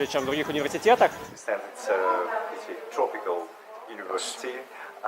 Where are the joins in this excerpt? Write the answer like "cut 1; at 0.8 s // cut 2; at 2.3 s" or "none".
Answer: cut 1; at 1.2 s

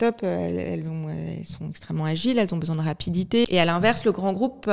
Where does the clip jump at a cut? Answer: cut 1; at 3.4 s

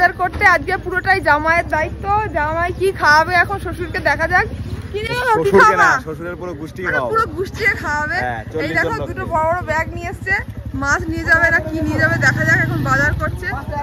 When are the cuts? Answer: none

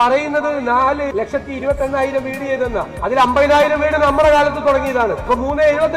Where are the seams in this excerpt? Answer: cut 1; at 1.1 s // cut 2; at 2.9 s // cut 3; at 5.2 s

